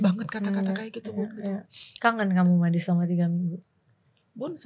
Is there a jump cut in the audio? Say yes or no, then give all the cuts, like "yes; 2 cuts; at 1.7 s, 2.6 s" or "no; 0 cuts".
yes; 1 cut; at 1.8 s